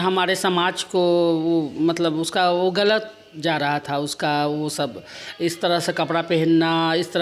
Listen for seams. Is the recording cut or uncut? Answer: uncut